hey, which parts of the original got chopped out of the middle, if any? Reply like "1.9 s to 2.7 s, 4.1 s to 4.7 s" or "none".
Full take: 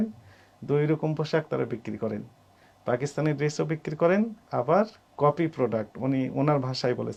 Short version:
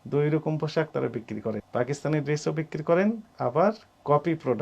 2.2 s to 2.8 s